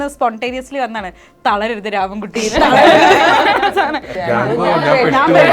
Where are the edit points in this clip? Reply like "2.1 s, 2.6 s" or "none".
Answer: 4.1 s